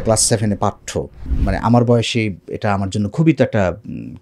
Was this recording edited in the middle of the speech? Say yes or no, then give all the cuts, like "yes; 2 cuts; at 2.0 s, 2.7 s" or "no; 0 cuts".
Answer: yes; 1 cut; at 1.2 s